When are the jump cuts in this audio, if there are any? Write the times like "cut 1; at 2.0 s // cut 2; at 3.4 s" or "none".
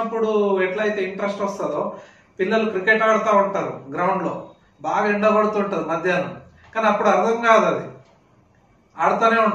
none